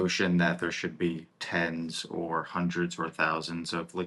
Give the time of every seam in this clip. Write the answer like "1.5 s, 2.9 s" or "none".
1.3 s